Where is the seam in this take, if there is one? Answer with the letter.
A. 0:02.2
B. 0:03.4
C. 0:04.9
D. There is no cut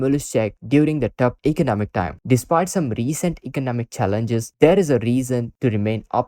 A